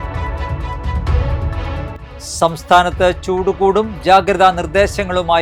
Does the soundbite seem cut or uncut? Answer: cut